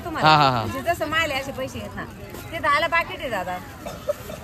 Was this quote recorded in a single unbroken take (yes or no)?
yes